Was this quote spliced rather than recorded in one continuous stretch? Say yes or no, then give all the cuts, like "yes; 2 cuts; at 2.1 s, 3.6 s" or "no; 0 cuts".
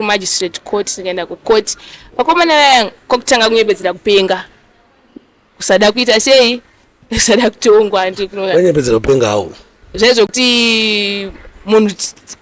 no; 0 cuts